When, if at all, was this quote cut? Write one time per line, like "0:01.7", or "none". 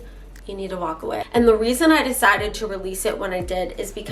0:01.3